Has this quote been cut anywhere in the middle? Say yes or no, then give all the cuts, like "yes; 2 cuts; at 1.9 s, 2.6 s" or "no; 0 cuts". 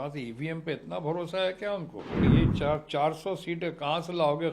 yes; 1 cut; at 2.2 s